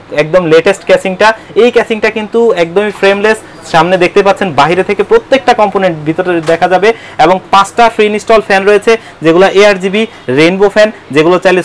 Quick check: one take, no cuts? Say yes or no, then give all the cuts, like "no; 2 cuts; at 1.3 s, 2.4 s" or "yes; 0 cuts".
yes; 0 cuts